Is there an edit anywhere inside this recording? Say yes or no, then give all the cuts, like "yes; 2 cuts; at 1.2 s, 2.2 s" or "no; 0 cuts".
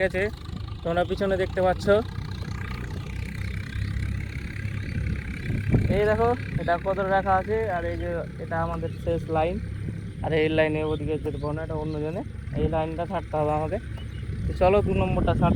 no; 0 cuts